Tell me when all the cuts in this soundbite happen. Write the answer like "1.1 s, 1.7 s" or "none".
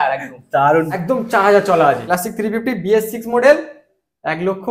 0.9 s, 2.1 s